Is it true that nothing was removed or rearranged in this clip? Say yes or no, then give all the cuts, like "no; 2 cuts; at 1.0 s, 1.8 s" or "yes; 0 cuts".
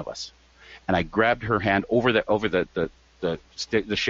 yes; 0 cuts